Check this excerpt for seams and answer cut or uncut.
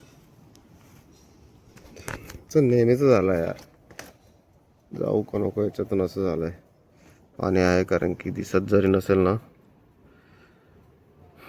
uncut